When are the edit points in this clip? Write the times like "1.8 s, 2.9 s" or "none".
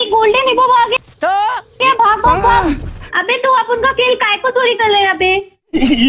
3.0 s